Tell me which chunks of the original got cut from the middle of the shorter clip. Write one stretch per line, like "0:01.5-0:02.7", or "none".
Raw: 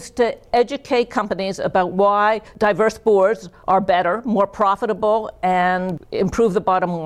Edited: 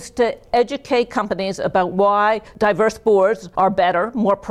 0:03.4-0:03.6